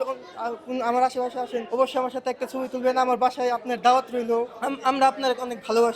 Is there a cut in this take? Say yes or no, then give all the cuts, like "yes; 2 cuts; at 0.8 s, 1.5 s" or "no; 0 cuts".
yes; 2 cuts; at 1.7 s, 4.6 s